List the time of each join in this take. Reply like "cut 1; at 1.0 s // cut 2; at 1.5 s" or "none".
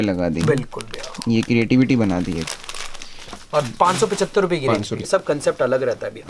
cut 1; at 5.1 s